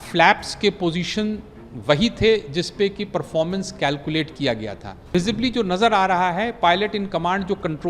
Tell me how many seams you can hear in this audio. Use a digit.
1